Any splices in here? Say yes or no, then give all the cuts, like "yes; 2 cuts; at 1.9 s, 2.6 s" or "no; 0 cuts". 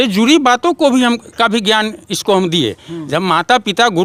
no; 0 cuts